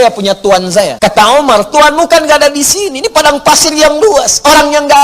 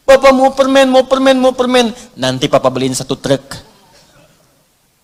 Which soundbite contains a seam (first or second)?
first